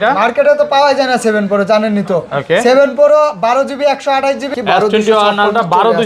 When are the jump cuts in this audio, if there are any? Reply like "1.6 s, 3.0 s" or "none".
4.5 s